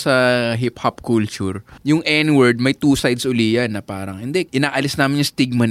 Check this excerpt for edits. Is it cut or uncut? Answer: cut